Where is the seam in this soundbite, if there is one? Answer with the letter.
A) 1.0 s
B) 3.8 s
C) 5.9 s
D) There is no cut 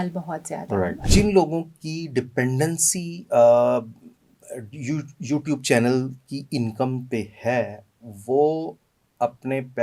A